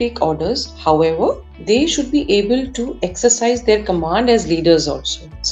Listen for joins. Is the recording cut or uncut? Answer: uncut